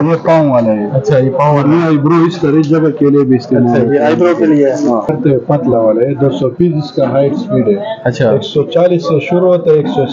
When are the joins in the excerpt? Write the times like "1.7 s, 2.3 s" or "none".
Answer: 5.1 s